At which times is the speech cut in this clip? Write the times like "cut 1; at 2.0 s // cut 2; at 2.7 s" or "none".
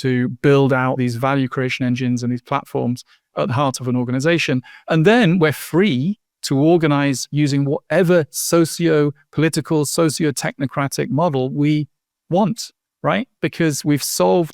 cut 1; at 1.0 s